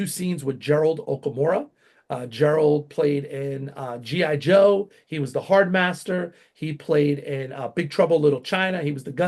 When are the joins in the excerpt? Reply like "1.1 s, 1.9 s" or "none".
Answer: none